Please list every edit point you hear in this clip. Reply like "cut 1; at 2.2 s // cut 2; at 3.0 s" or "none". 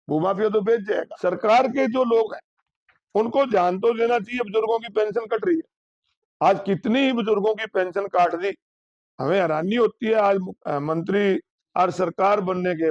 cut 1; at 1.1 s // cut 2; at 11.6 s